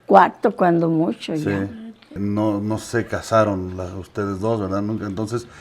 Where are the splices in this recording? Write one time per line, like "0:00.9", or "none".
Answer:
0:02.2